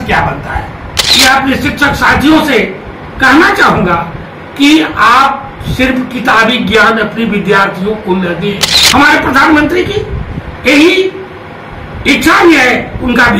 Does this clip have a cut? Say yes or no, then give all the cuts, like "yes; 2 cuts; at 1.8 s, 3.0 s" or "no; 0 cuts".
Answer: yes; 1 cut; at 1.0 s